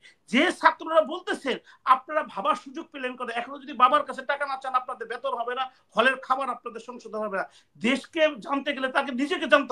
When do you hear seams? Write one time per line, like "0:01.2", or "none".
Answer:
none

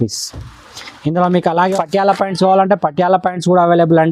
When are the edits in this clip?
0:01.6

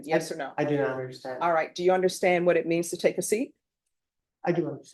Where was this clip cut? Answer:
none

